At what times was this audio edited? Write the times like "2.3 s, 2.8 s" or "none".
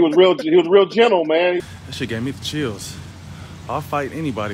1.6 s